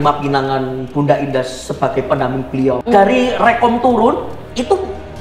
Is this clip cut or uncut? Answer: cut